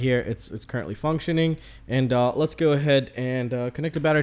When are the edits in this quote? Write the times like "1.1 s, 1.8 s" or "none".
none